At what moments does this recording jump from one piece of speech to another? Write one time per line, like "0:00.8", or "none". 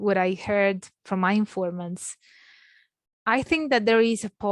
0:00.9